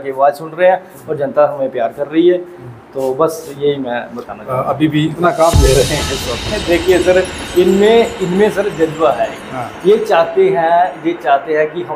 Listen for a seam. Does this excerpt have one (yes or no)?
yes